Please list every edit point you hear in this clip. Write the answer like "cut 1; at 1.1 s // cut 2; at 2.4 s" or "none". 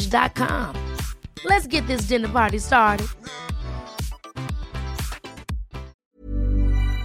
cut 1; at 6.0 s

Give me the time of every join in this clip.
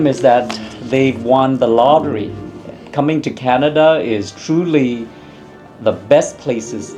none

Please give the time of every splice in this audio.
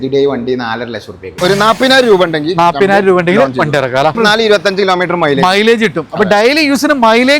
cut 1; at 1.2 s // cut 2; at 4.2 s

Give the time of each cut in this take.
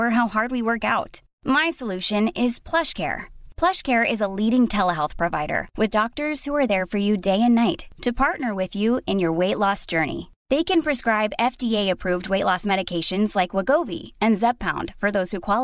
none

